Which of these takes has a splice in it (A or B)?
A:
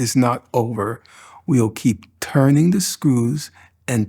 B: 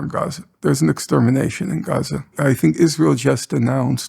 B